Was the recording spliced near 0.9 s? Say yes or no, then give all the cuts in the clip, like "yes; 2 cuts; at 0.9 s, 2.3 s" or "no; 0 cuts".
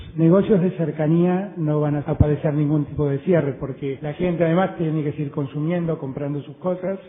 yes; 1 cut; at 0.9 s